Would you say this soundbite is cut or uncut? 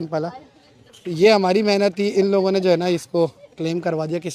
uncut